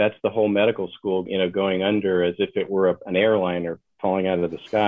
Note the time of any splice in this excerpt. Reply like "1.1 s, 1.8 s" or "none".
1.2 s